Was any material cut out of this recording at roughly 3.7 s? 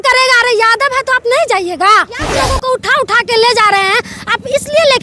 no; 1 cut; at 2.3 s

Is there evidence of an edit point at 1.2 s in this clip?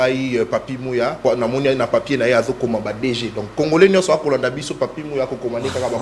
yes; 1 cut; at 1.2 s

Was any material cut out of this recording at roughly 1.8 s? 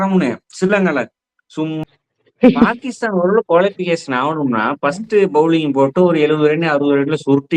yes; 1 cut; at 1.8 s

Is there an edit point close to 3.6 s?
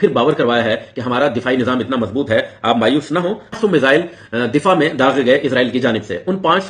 yes; 1 cut; at 3.6 s

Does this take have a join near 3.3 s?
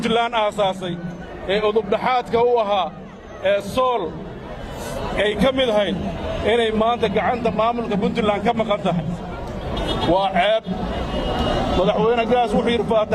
no; 0 cuts

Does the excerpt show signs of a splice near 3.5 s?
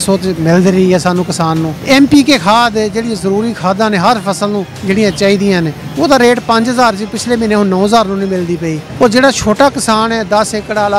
no; 4 cuts; at 1.7 s, 4.7 s, 5.8 s, 8.8 s

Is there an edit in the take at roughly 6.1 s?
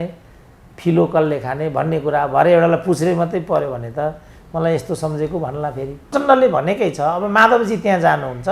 yes; 1 cut; at 6.1 s

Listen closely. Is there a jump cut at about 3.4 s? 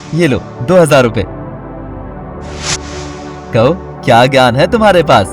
yes; 2 cuts; at 1.3 s, 3.4 s

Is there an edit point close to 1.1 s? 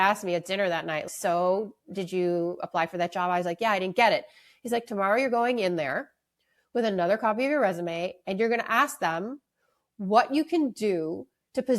yes; 1 cut; at 1.1 s

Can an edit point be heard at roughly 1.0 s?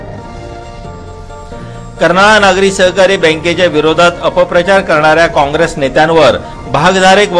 yes; 1 cut; at 1.0 s

